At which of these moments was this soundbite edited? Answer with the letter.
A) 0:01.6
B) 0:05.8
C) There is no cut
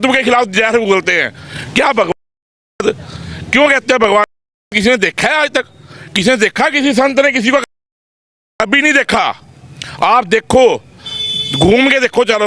C